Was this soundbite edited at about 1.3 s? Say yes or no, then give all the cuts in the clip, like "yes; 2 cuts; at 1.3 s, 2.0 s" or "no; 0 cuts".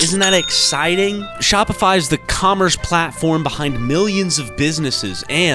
yes; 1 cut; at 1.3 s